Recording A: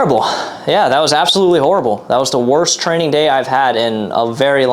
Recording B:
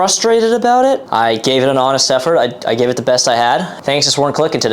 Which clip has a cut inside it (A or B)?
B